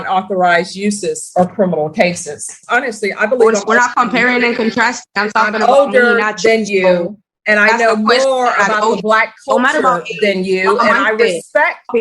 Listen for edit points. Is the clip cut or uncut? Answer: cut